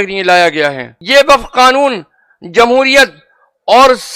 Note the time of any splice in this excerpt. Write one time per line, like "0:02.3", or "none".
0:00.9